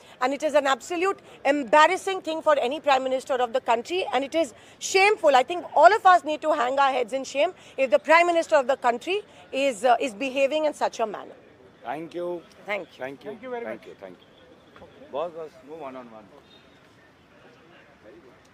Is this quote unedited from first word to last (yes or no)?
yes